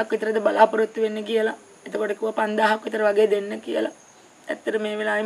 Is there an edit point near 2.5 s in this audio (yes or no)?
no